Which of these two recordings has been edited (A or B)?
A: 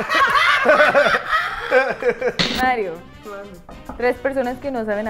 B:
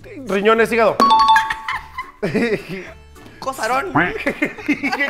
A